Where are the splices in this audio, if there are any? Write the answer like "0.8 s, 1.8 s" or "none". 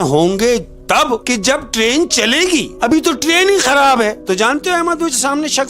1.2 s, 2.7 s, 4.2 s